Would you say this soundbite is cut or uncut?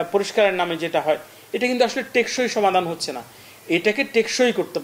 uncut